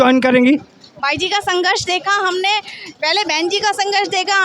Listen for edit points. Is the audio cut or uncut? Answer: uncut